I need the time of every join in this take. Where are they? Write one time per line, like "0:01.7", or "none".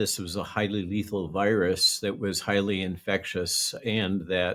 none